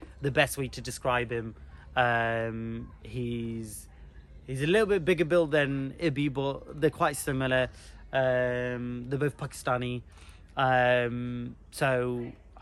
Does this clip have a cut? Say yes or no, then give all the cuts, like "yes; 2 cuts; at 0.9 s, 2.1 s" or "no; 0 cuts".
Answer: no; 0 cuts